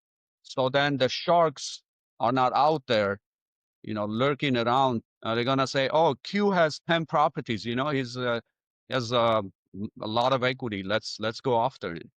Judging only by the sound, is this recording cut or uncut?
cut